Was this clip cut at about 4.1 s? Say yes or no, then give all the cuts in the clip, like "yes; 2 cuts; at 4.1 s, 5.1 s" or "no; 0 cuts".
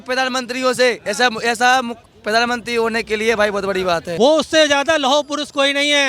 yes; 1 cut; at 4.1 s